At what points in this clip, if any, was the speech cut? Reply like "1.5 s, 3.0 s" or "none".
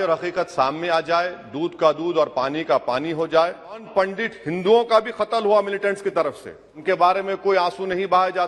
3.9 s, 6.8 s